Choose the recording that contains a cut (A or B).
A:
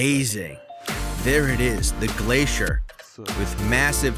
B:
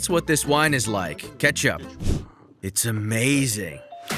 B